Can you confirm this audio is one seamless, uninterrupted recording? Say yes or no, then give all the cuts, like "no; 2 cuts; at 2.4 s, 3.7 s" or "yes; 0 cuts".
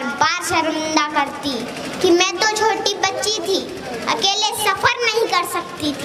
yes; 0 cuts